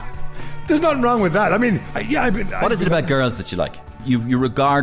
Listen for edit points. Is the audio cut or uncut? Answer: cut